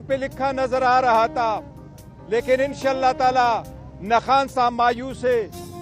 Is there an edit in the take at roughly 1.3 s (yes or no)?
no